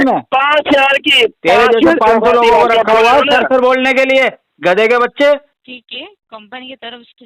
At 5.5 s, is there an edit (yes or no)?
yes